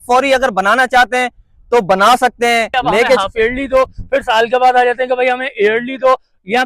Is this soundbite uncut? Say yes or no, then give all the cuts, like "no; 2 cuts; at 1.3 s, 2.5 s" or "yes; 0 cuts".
no; 1 cut; at 3.2 s